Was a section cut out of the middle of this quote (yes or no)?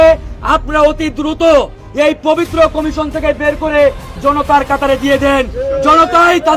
no